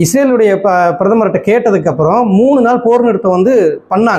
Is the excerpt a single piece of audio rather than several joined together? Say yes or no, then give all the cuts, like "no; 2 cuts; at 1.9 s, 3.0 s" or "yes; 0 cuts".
yes; 0 cuts